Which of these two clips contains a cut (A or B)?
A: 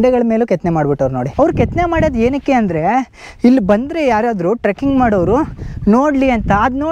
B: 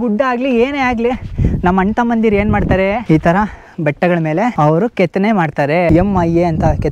B